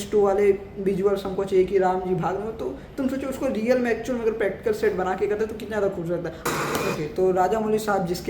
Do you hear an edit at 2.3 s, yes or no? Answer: no